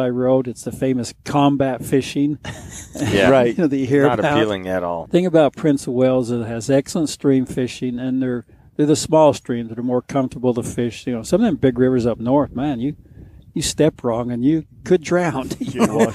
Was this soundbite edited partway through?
yes; 1 cut; at 5.0 s

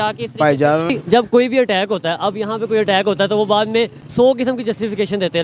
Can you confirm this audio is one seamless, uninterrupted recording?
no; 1 cut; at 0.9 s

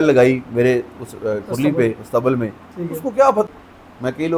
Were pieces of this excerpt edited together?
yes; 1 cut; at 3.4 s

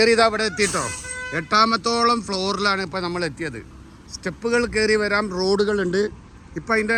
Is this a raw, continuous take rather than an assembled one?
yes; 0 cuts

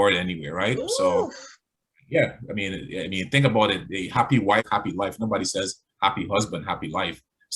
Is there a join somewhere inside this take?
yes; 1 cut; at 4.7 s

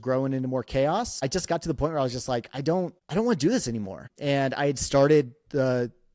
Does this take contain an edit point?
yes; 2 cuts; at 1.2 s, 3.0 s

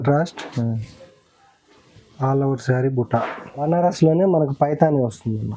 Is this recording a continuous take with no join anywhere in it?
no; 1 cut; at 3.6 s

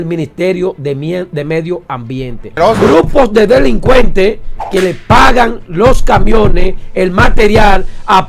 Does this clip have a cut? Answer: yes; 1 cut; at 2.5 s

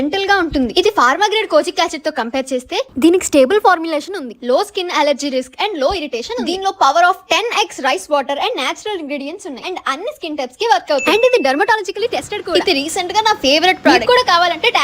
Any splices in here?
yes; 3 cuts; at 11.0 s, 12.5 s, 13.9 s

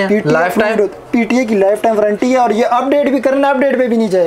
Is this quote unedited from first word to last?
yes; 0 cuts

